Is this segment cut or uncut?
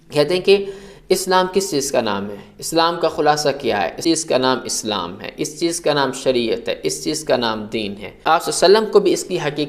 cut